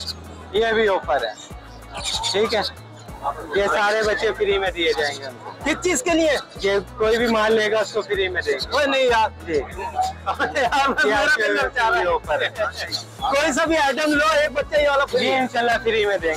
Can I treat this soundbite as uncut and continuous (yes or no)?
yes